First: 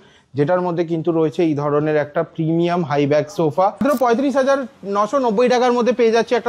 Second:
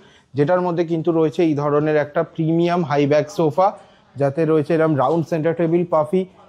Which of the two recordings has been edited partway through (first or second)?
first